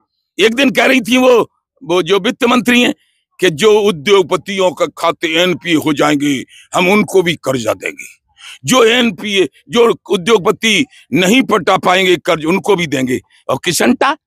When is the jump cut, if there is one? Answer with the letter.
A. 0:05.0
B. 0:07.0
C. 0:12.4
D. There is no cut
D